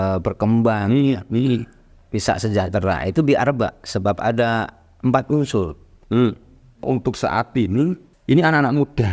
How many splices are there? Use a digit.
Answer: 2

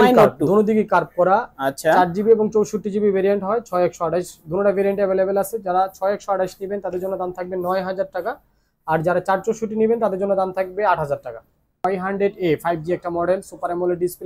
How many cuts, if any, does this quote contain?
1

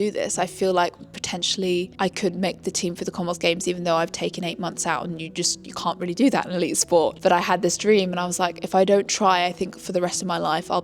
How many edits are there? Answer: 0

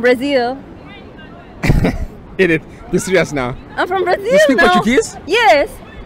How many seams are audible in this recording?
0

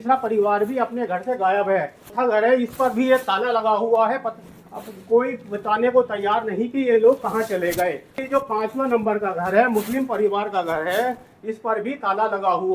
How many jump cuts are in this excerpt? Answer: 2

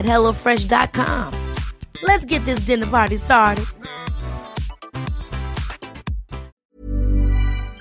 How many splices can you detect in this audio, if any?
1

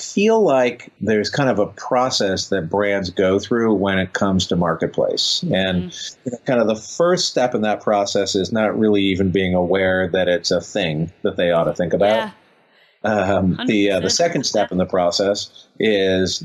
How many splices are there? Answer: 1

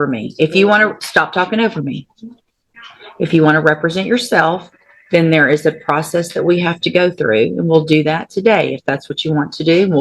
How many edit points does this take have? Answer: 0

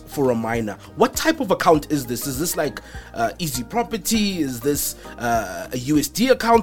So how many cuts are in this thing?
0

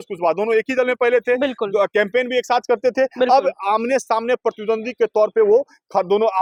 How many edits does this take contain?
0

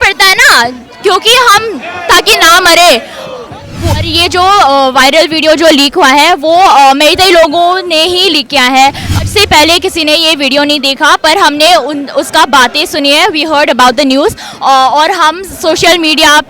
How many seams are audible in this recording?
2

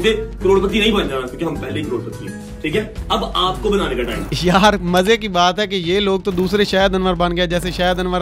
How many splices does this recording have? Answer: 1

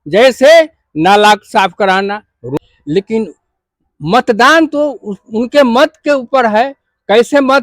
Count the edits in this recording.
1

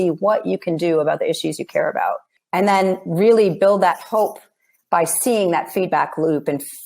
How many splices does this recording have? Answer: 1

